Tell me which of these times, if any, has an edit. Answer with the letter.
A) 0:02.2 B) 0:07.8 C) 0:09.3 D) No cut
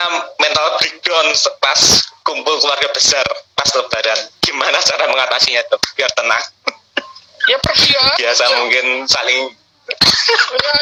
D